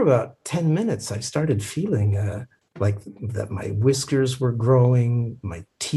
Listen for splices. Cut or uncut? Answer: uncut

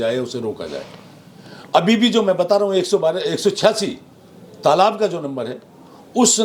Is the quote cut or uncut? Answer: uncut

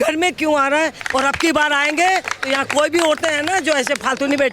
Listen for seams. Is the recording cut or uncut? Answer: cut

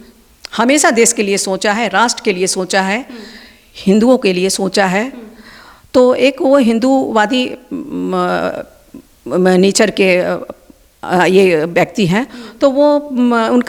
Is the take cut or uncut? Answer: uncut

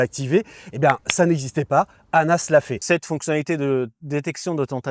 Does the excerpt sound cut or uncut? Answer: cut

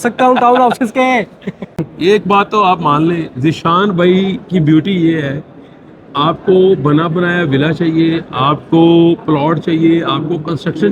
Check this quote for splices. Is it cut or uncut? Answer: cut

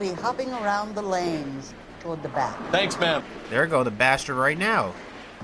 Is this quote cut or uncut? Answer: cut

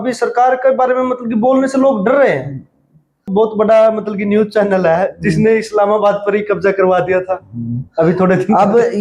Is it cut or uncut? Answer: cut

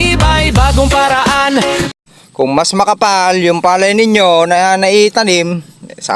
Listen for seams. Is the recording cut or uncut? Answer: cut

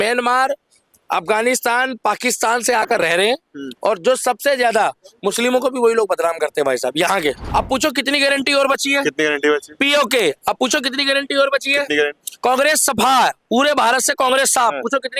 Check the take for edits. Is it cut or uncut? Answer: cut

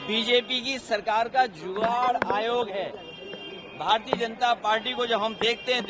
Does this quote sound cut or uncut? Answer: uncut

